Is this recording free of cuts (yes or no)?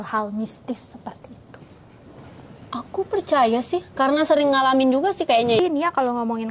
no